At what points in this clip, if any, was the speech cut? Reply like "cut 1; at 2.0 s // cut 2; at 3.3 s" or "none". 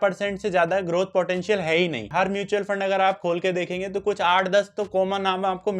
cut 1; at 2.1 s